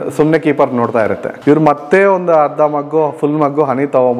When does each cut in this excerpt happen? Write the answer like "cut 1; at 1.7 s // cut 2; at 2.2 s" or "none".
cut 1; at 1.3 s